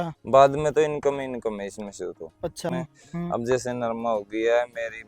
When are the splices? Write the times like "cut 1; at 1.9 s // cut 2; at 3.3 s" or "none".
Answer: cut 1; at 2.7 s